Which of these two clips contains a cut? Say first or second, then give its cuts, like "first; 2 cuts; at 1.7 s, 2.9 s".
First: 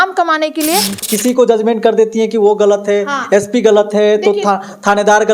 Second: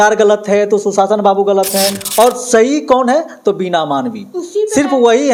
first; 1 cut; at 1.0 s